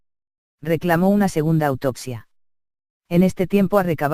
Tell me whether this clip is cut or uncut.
cut